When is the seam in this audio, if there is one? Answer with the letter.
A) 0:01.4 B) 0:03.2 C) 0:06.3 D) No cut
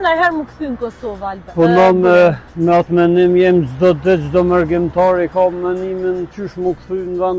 D